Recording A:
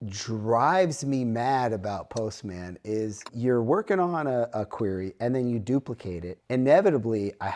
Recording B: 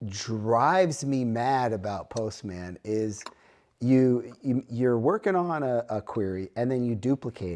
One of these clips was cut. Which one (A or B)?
A